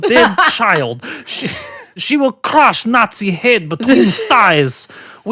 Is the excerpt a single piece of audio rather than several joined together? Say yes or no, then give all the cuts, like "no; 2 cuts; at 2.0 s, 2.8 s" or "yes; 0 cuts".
no; 1 cut; at 2.0 s